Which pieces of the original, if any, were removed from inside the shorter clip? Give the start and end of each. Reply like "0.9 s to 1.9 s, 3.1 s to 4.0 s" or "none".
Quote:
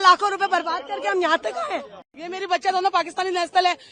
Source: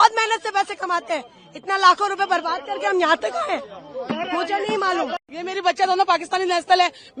3.9 s to 5.2 s